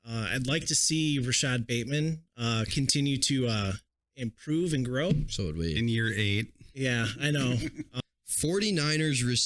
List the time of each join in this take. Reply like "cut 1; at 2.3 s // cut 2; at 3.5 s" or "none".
cut 1; at 7.9 s